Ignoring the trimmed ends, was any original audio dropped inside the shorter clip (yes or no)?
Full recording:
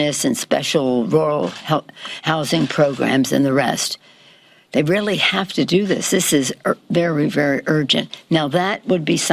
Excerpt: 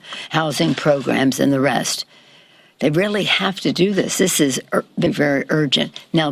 yes